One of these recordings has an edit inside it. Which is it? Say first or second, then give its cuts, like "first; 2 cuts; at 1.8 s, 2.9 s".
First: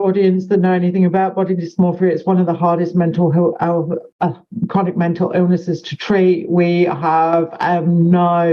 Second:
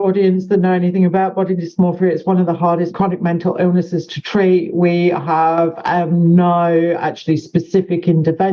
second; 1 cut; at 2.9 s